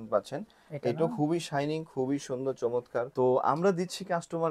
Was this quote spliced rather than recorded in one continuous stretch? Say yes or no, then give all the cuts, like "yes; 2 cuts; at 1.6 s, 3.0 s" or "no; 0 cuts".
yes; 1 cut; at 3.1 s